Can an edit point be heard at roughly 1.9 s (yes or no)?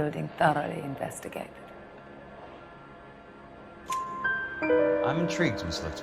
no